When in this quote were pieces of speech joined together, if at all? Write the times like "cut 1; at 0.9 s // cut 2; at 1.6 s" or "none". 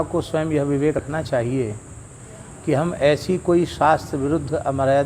cut 1; at 1.0 s